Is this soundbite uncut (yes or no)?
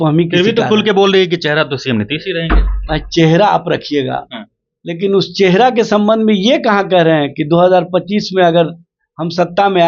yes